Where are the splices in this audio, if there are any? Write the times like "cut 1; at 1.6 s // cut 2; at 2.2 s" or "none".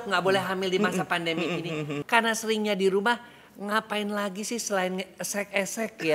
cut 1; at 2.0 s